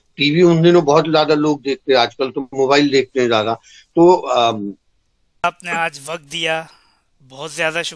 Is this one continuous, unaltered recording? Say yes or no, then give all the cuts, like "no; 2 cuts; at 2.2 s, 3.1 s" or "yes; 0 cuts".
no; 1 cut; at 5.4 s